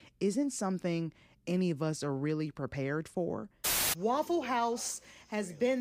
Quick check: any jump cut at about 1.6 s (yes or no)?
no